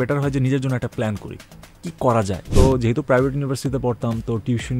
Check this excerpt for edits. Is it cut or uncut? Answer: cut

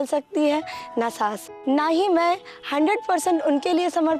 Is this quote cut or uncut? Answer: cut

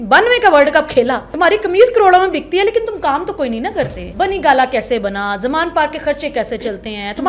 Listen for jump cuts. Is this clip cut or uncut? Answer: cut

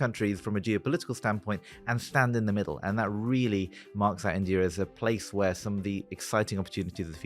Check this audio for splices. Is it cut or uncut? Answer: uncut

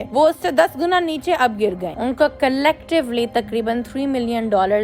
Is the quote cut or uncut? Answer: cut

